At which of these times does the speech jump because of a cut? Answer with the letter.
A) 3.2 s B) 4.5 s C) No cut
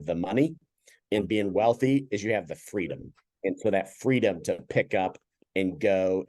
A